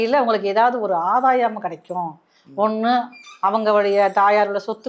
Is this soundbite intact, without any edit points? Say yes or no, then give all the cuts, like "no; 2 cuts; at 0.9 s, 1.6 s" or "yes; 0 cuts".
yes; 0 cuts